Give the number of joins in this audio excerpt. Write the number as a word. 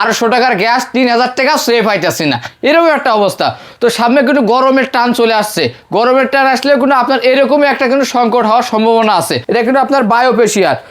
one